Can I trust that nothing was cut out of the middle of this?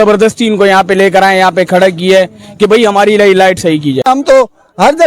no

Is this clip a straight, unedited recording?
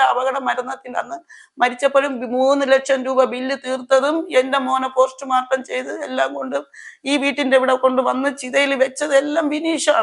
yes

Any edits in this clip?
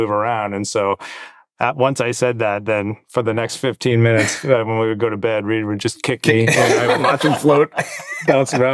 no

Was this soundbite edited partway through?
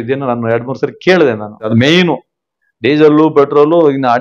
yes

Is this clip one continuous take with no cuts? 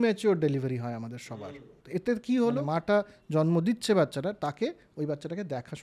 no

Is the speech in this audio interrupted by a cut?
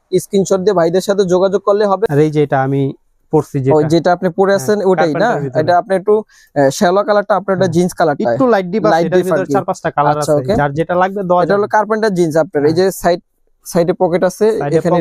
yes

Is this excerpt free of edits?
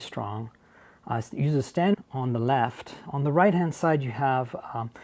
yes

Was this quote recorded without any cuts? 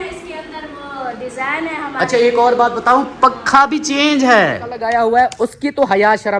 no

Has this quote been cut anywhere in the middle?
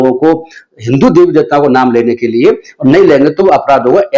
no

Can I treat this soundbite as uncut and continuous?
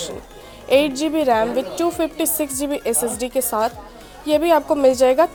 yes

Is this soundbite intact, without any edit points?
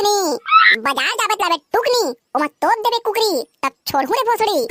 yes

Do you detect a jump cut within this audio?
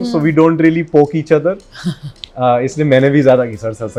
no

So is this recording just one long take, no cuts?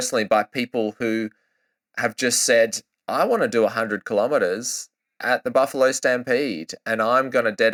yes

